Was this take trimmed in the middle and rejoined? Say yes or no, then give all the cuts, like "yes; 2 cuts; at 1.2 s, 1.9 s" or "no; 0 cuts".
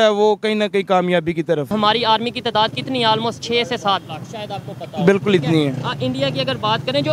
yes; 1 cut; at 1.7 s